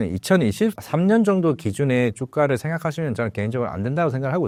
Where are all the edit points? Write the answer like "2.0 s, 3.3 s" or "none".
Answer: none

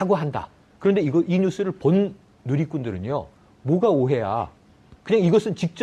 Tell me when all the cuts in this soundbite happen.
3.9 s

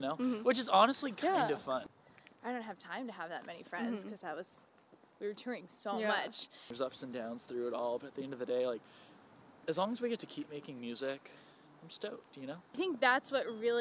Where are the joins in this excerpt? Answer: 1.8 s, 6.7 s, 12.8 s

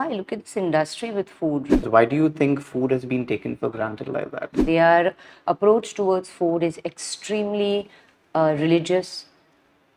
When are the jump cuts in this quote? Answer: 1.8 s, 4.5 s

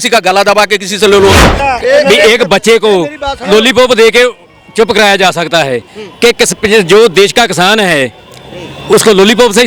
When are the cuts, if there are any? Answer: 1.5 s

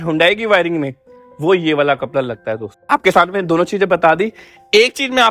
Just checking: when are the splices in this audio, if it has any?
none

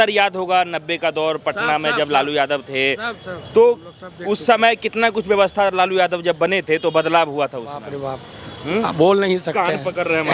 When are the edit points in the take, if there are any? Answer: none

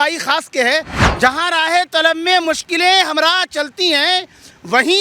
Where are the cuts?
1.0 s

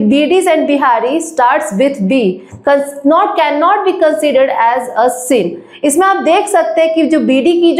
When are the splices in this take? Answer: none

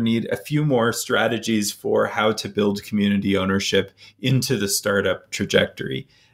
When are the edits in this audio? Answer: none

